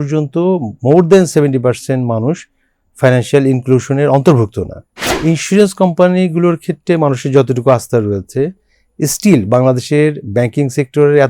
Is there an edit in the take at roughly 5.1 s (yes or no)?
yes